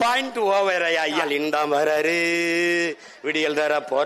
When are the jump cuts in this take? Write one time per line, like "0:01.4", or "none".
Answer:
0:01.2